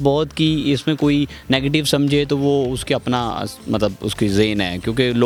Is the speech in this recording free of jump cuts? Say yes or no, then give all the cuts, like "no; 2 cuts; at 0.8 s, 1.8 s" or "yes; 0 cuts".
yes; 0 cuts